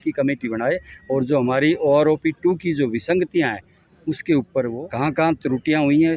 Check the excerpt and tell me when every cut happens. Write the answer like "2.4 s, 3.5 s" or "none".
4.8 s